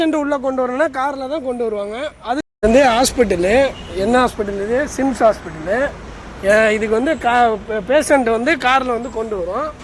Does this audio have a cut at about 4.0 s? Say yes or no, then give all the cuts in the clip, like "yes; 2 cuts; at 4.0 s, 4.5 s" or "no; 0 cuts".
no; 1 cut; at 2.4 s